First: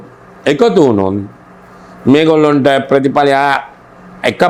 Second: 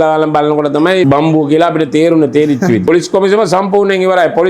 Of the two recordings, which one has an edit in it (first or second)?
second